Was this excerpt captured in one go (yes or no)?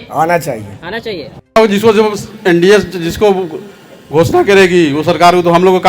no